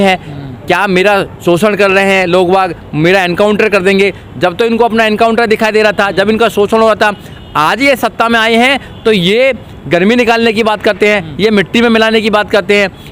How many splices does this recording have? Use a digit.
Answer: 0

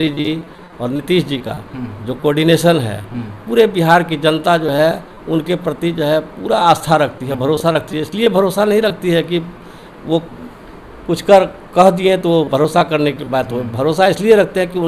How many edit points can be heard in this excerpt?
0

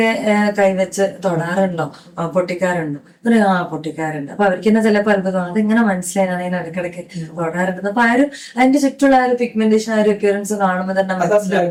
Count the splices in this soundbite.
0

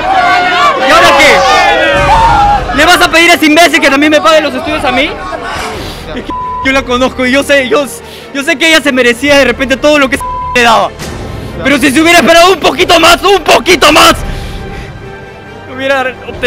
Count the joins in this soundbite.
1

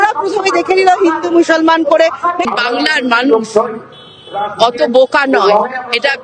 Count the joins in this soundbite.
1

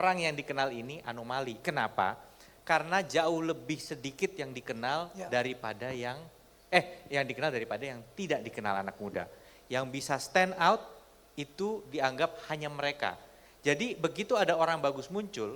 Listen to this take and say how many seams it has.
0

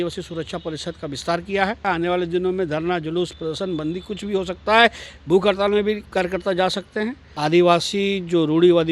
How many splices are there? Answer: 2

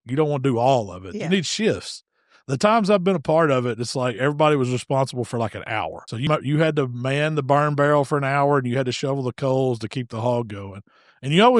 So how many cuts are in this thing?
1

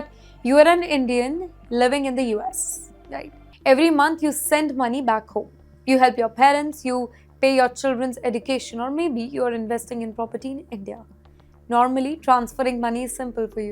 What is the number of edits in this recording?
1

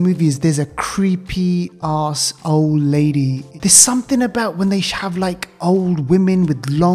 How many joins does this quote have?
1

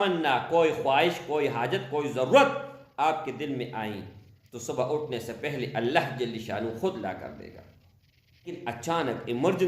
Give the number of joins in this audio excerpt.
1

